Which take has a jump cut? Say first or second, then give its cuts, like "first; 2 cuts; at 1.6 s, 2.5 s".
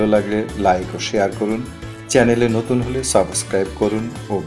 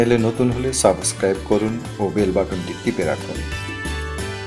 second; 1 cut; at 3.2 s